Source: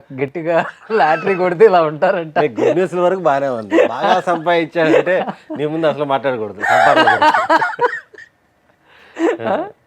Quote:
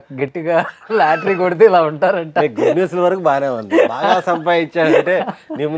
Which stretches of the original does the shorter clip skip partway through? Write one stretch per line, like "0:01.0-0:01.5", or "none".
none